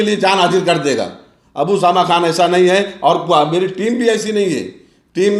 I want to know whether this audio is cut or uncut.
uncut